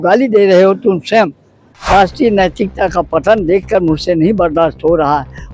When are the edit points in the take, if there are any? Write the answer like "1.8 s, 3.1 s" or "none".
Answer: 1.7 s